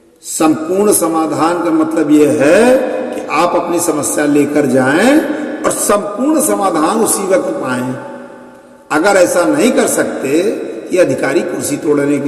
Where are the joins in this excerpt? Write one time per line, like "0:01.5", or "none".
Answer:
none